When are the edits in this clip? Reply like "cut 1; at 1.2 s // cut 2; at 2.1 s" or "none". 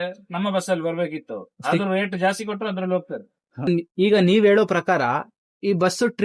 cut 1; at 3.8 s